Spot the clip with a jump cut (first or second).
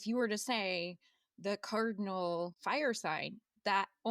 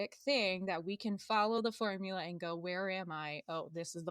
first